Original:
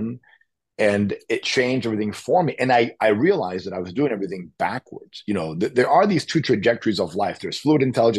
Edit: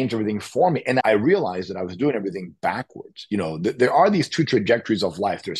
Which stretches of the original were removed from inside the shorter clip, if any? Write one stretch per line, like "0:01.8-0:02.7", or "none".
0:02.7-0:03.0